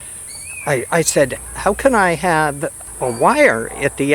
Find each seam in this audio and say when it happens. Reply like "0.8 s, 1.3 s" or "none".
1.4 s, 2.8 s